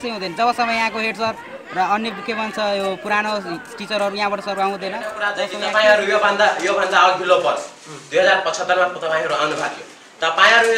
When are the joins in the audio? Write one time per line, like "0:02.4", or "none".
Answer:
0:05.3